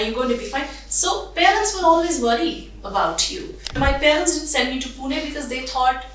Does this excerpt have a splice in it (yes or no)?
yes